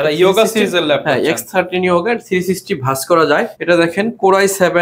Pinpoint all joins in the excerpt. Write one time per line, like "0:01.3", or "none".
0:03.5